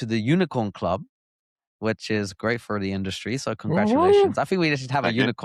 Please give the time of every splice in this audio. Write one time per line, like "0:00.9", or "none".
none